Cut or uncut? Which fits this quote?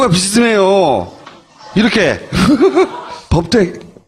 cut